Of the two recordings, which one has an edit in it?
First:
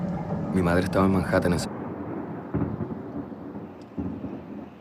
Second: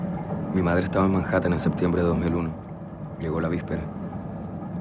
second; 1 cut; at 1.6 s

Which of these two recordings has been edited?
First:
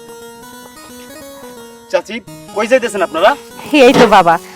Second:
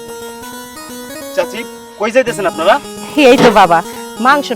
second; 1 cut; at 1.3 s

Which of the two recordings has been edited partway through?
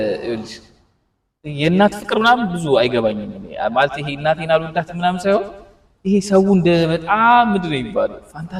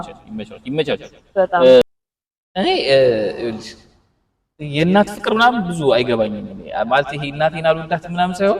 second; 1 cut; at 1.8 s

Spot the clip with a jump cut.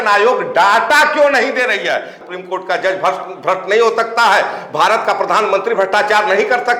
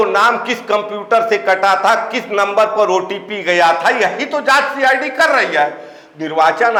first; 1 cut; at 2.2 s

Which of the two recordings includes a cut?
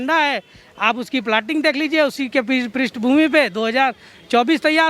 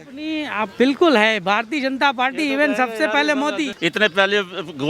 second; 1 cut; at 3.7 s

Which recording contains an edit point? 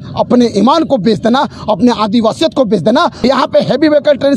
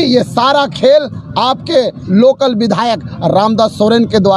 first; 1 cut; at 3.2 s

